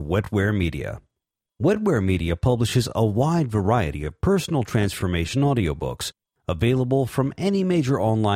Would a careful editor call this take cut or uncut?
uncut